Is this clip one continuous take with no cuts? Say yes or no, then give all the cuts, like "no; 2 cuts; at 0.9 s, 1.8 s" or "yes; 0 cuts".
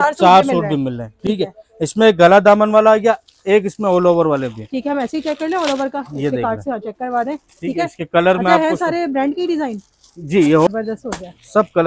yes; 0 cuts